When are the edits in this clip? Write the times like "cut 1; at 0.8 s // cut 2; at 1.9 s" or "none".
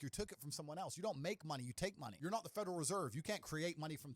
cut 1; at 2.1 s